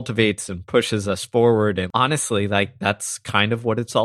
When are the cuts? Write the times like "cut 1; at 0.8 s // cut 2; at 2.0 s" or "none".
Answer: cut 1; at 1.9 s